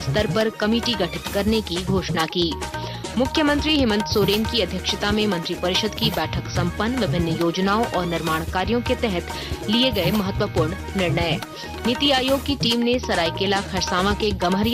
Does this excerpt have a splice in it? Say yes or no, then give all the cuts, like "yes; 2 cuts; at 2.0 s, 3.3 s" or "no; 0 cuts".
no; 0 cuts